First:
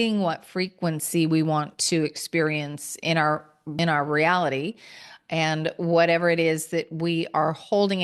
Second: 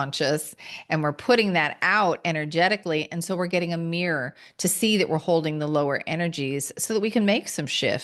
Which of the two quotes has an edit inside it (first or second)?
first